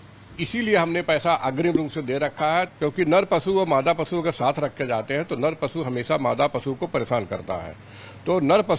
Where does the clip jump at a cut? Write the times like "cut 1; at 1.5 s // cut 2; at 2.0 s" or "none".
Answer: cut 1; at 2.7 s